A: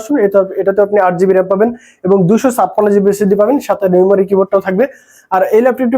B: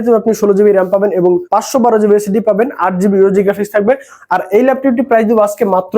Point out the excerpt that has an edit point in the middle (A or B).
B